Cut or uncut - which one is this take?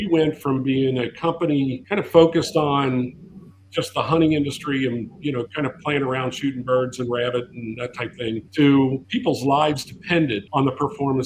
cut